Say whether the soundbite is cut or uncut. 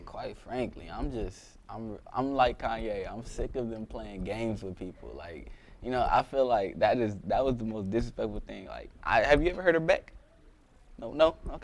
cut